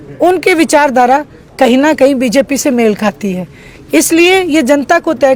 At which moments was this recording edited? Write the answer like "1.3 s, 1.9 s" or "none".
none